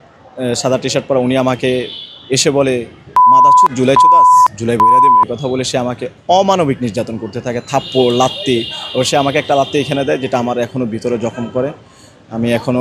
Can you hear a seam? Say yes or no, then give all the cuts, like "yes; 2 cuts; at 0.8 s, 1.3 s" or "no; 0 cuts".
no; 0 cuts